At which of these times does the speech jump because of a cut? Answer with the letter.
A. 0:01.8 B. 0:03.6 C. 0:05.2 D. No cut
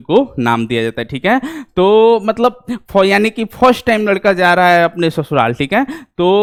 D